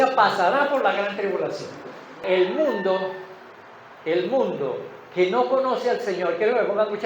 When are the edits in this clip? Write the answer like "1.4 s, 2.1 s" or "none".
2.2 s

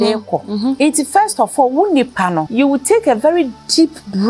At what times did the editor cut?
0.8 s, 2.5 s

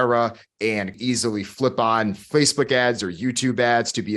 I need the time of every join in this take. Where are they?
0.9 s

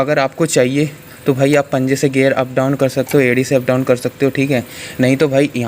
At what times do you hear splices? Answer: none

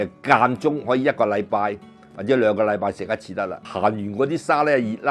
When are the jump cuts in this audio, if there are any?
3.7 s

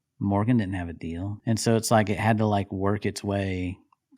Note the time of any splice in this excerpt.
1.4 s

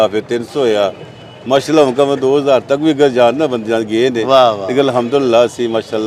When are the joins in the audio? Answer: none

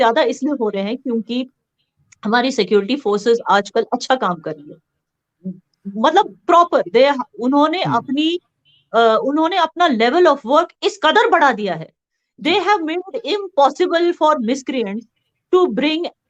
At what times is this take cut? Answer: none

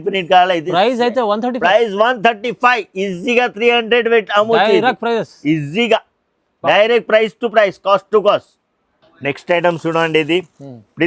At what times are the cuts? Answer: none

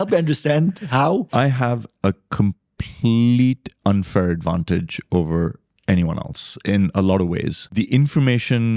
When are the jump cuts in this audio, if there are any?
1.3 s, 7.6 s

